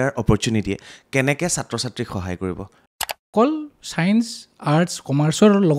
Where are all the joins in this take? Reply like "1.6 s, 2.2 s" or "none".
3.2 s